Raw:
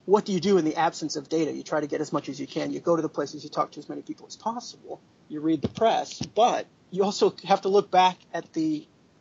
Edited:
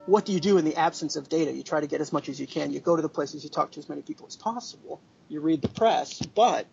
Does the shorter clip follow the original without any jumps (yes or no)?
yes